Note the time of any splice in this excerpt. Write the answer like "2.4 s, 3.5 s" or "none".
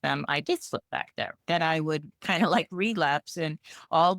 1.4 s, 2.1 s